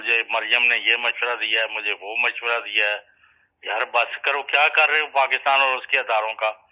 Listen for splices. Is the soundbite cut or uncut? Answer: uncut